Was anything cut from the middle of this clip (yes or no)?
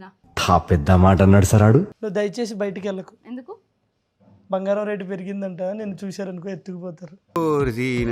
no